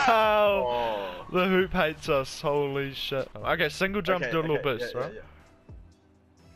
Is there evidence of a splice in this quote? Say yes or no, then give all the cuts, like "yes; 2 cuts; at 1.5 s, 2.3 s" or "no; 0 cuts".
yes; 1 cut; at 3.3 s